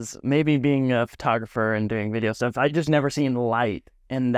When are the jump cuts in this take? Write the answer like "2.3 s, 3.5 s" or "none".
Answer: none